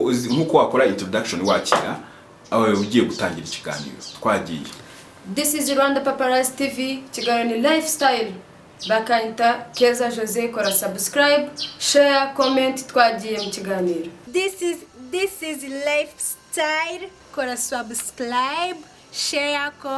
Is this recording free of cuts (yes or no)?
no